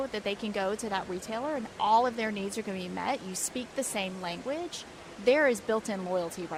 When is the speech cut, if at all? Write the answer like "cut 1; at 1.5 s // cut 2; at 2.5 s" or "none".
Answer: none